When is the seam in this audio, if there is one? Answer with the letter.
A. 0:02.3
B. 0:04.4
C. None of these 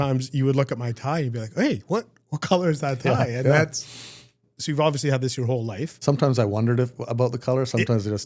B